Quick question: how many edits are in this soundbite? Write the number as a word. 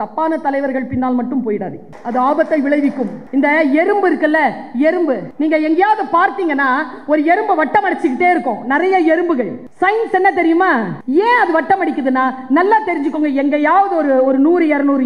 five